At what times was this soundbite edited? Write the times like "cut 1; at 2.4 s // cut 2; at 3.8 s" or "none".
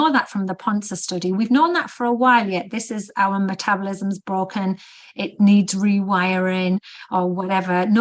none

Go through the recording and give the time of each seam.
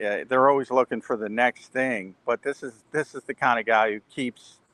none

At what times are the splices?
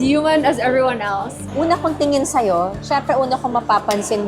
cut 1; at 1.5 s

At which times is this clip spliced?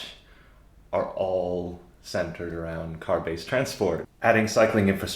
cut 1; at 4.0 s

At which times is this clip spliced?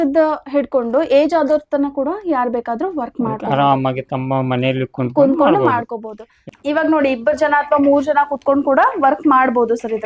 cut 1; at 6.1 s

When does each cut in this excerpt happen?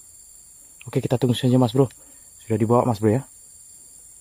none

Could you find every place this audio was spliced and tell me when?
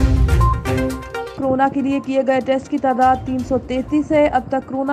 cut 1; at 1.4 s

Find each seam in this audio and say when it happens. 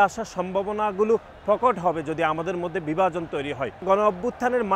cut 1; at 3.8 s

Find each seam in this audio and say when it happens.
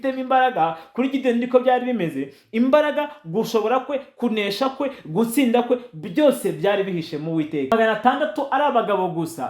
cut 1; at 7.7 s

